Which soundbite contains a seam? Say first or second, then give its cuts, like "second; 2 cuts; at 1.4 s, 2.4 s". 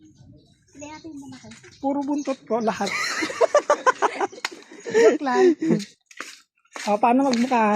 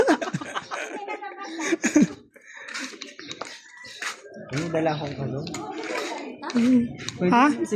first; 1 cut; at 6.0 s